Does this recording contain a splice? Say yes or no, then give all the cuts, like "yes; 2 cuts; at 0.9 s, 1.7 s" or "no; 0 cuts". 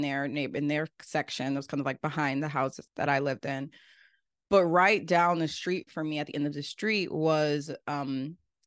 no; 0 cuts